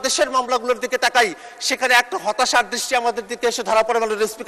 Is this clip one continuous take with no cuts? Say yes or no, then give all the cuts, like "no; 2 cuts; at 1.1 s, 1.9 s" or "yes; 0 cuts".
yes; 0 cuts